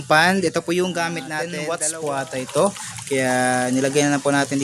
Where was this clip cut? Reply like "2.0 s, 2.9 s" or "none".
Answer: 1.4 s